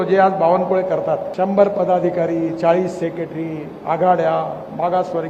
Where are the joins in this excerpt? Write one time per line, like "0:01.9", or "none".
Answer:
0:01.3